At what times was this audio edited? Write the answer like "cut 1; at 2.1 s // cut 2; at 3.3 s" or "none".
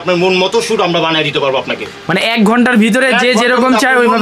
none